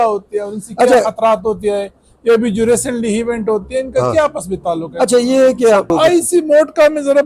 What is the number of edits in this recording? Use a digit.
1